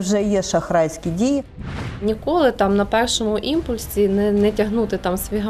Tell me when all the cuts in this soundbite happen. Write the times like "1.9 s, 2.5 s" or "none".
1.8 s